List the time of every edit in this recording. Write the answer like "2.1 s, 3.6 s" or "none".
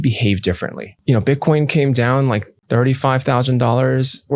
1.0 s, 2.5 s